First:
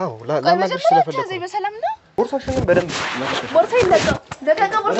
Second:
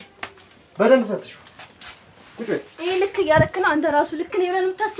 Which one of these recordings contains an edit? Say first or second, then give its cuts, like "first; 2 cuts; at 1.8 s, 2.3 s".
first; 1 cut; at 2.0 s